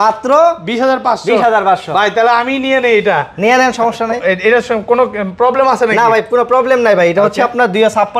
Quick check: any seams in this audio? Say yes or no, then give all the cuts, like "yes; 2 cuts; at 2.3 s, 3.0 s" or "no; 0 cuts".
no; 0 cuts